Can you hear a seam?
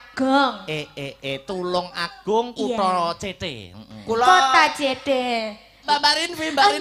yes; 1 cut; at 5.8 s

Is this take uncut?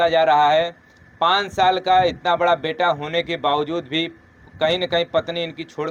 yes; 0 cuts

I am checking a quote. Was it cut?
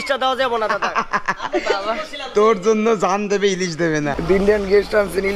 yes; 1 cut; at 4.1 s

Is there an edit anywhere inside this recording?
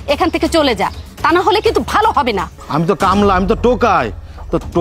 yes; 1 cut; at 2.6 s

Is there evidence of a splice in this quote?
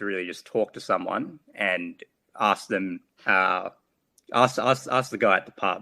no; 0 cuts

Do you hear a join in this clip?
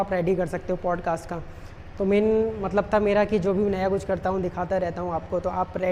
no; 0 cuts

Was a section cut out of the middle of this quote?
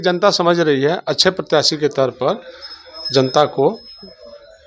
no; 0 cuts

